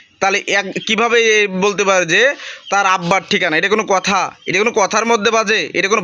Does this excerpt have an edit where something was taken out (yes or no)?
no